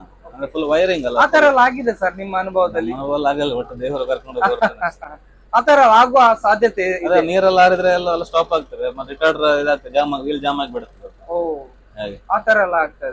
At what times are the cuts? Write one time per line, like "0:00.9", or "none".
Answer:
none

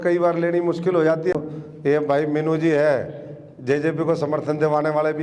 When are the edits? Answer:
0:01.3

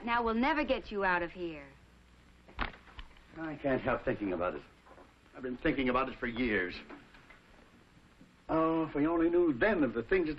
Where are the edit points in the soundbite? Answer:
0:03.2

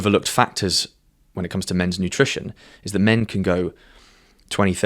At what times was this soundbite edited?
none

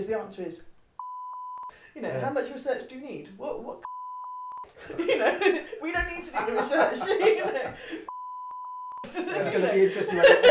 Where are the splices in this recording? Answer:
0:01.3
0:04.3
0:08.6

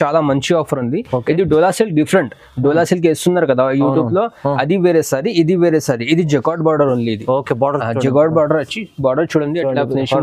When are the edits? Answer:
none

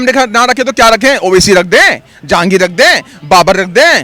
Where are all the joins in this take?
none

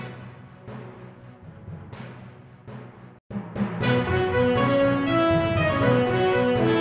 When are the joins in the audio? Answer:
none

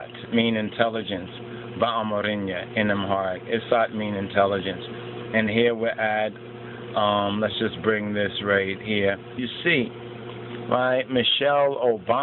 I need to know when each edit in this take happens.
none

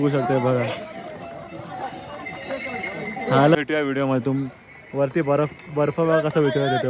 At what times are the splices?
0:03.6

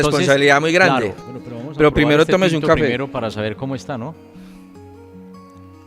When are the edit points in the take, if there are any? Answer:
0:01.2

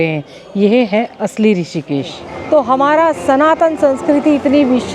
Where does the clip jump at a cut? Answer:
0:02.3

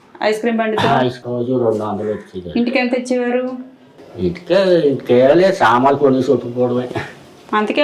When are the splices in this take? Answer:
0:01.2

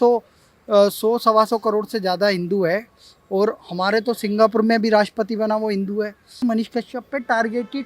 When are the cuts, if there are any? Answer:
0:06.4

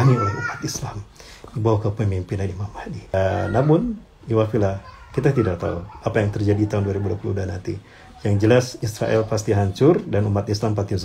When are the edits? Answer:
0:03.1

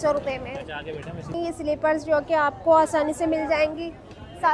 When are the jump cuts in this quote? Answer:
0:01.3

